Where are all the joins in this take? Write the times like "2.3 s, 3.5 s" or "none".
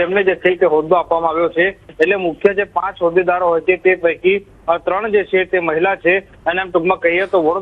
none